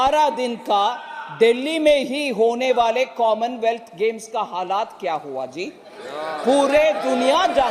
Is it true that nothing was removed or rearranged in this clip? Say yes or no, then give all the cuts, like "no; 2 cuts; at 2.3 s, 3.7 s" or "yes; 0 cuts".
yes; 0 cuts